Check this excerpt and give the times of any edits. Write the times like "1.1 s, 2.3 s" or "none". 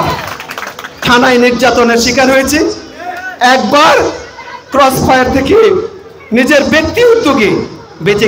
none